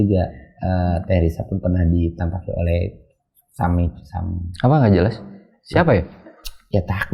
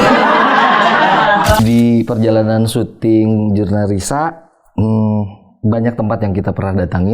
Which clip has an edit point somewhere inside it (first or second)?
second